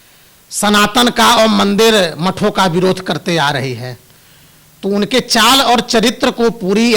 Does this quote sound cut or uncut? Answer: uncut